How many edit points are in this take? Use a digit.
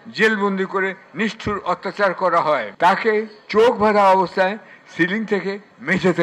1